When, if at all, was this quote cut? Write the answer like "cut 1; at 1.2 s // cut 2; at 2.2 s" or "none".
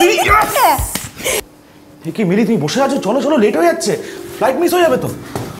cut 1; at 1.4 s